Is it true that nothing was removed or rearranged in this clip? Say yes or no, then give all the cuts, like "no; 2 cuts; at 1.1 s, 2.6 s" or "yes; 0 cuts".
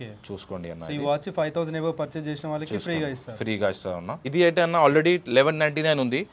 no; 1 cut; at 4.2 s